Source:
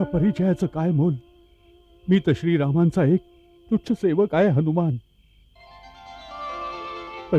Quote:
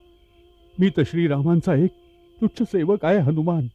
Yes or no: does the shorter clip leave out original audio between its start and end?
no